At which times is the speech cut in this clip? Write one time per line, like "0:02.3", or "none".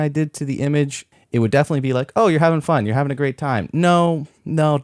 0:01.0